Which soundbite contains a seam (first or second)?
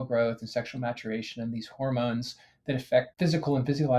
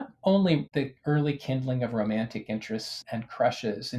second